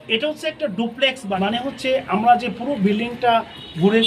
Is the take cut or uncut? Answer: cut